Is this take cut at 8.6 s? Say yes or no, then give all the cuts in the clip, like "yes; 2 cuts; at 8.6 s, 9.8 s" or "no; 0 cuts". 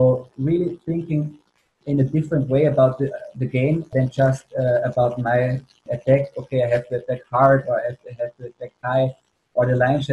no; 2 cuts; at 3.9 s, 5.8 s